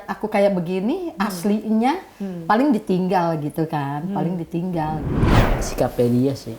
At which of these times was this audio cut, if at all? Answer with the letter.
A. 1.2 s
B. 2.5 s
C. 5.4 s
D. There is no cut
C